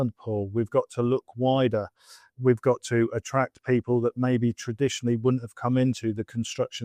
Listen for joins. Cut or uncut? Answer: uncut